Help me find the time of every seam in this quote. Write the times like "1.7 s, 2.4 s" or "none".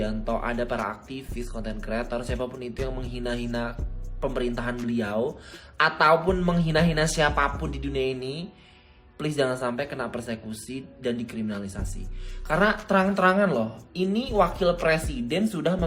none